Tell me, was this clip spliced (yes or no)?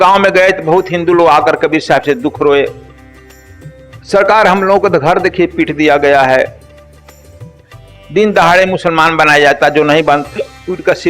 yes